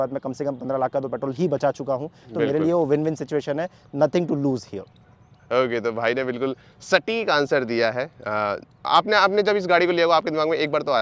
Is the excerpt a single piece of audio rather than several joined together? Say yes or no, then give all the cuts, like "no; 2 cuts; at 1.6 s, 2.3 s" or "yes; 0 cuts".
yes; 0 cuts